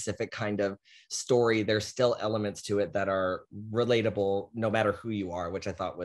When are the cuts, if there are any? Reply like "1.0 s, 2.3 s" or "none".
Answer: none